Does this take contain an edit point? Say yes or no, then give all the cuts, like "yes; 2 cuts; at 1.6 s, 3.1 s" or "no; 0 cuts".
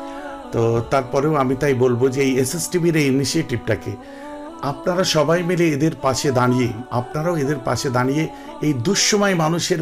yes; 1 cut; at 6.9 s